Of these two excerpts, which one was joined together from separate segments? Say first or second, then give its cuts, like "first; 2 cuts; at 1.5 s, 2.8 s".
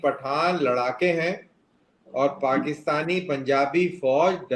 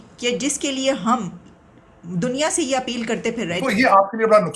second; 1 cut; at 3.6 s